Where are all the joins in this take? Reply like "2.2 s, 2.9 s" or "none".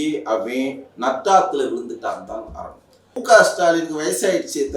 3.2 s